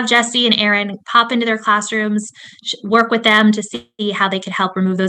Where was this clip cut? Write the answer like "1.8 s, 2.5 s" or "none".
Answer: none

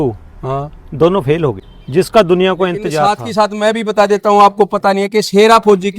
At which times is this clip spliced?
1.7 s, 3.0 s

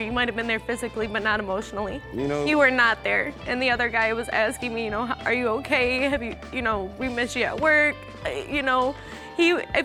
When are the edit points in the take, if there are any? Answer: none

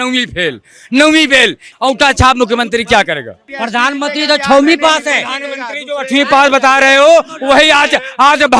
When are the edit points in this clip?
1.6 s, 3.4 s

